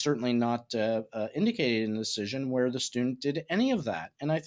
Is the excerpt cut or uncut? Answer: uncut